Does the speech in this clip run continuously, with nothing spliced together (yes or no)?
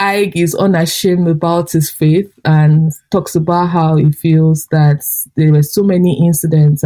yes